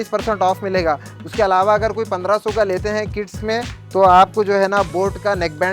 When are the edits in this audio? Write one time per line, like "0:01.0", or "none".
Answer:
none